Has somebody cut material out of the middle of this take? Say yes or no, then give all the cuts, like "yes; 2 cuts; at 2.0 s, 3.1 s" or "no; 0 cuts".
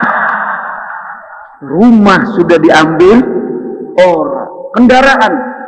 no; 0 cuts